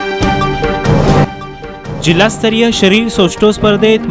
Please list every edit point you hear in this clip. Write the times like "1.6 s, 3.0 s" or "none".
1.2 s